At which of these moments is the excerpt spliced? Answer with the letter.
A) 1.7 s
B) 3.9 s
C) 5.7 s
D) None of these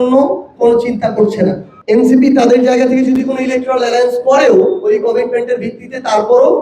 A